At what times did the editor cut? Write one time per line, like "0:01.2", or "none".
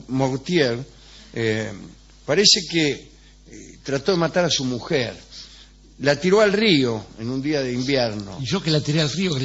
0:03.9